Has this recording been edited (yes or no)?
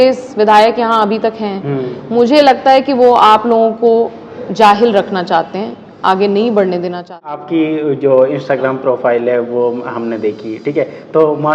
yes